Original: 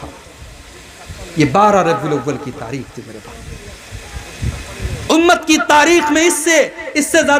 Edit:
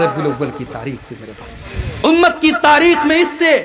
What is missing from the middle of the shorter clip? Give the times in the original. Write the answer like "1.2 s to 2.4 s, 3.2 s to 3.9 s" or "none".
3.5 s to 4.7 s